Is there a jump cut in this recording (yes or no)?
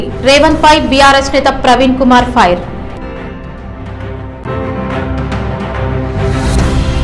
yes